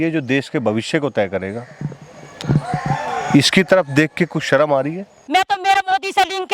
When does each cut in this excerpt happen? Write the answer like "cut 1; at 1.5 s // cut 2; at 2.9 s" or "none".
cut 1; at 5.1 s